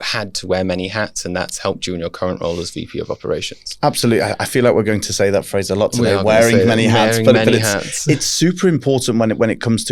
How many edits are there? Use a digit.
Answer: 0